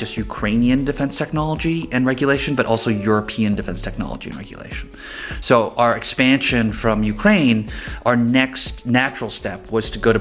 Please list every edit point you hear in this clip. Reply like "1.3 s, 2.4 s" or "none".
none